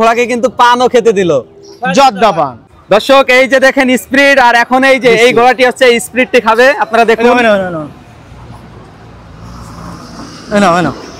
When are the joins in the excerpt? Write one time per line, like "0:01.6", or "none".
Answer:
0:02.8

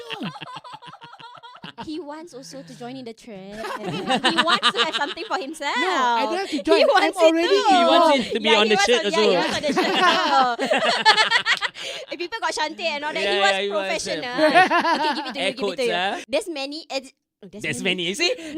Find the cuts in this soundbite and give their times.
0:01.7
0:16.2

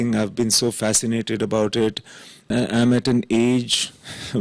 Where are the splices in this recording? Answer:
0:02.5

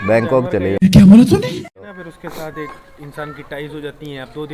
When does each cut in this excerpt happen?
none

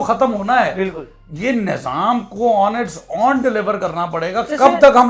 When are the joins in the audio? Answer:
none

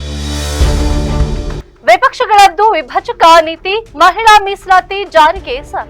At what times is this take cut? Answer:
0:01.6

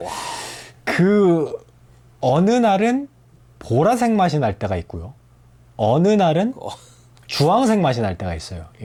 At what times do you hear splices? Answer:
none

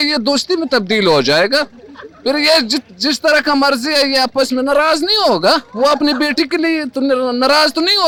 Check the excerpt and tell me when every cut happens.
none

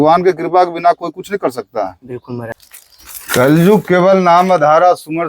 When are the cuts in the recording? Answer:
0:02.7

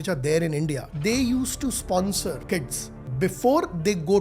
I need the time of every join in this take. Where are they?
0:00.9
0:02.9

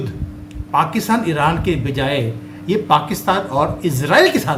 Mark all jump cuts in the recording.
none

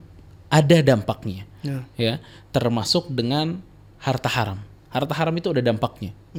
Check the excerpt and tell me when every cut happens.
none

